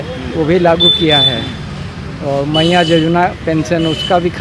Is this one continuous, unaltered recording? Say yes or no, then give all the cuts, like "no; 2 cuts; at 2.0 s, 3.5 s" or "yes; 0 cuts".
yes; 0 cuts